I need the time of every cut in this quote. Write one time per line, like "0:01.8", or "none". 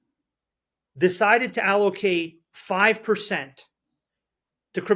none